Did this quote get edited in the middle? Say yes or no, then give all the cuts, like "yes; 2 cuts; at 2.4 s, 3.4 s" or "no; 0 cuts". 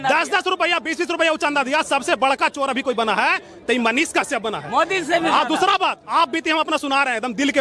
no; 0 cuts